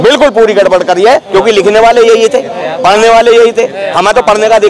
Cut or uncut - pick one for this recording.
uncut